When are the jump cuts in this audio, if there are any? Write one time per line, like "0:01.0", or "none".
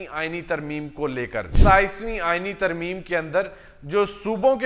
0:01.6

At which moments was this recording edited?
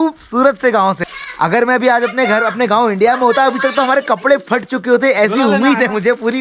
none

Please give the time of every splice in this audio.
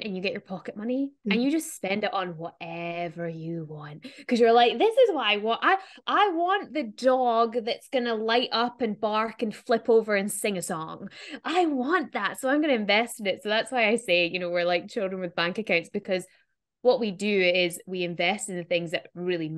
0:01.2

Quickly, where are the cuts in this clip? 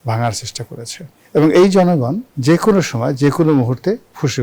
0:02.3

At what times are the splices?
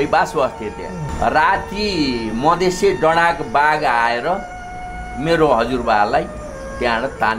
0:01.1

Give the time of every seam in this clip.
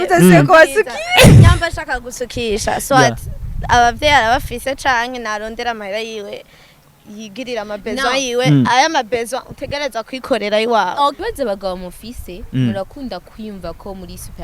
0:11.2

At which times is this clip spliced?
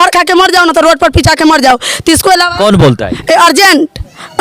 none

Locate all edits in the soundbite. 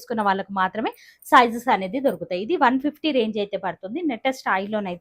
none

